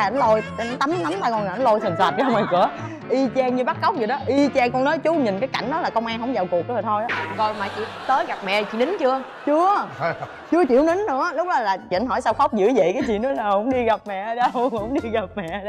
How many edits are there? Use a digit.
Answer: 0